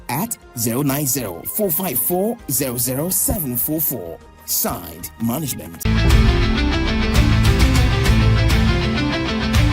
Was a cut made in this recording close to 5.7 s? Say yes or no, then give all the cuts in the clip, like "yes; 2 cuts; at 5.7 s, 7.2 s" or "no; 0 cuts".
yes; 1 cut; at 5.7 s